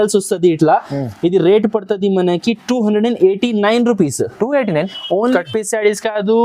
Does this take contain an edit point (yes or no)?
yes